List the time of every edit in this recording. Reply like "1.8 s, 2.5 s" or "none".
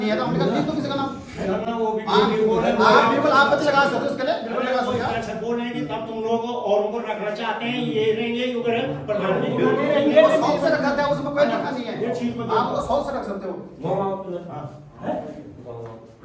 none